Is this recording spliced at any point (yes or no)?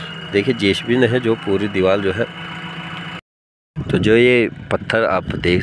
yes